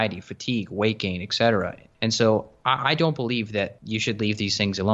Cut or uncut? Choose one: cut